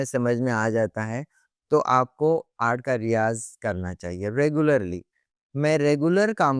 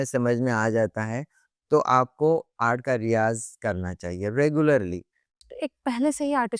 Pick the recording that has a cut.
second; 1 cut; at 5.5 s

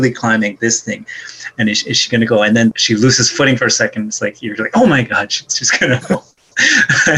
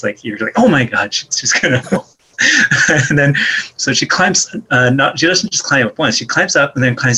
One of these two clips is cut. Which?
first; 1 cut; at 2.7 s

